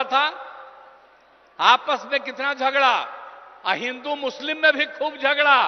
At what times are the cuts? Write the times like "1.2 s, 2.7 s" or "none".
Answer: none